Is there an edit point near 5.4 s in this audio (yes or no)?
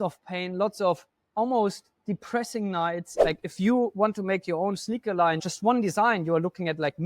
yes